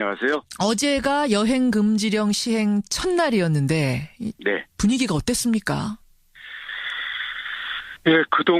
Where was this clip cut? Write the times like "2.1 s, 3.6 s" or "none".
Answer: none